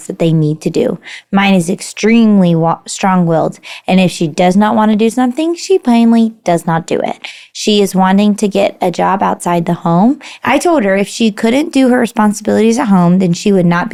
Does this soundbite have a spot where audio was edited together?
no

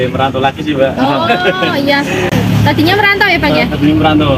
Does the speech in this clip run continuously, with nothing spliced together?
yes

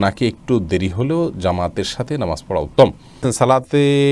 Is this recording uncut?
no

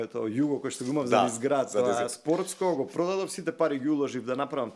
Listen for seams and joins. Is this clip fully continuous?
yes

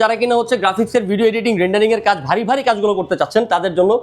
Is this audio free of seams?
yes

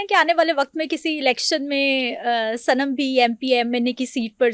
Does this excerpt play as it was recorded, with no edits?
yes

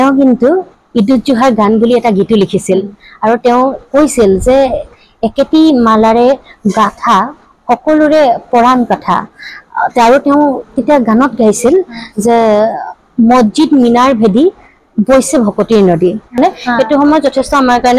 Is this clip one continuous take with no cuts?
no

